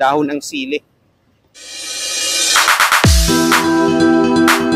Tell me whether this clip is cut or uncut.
cut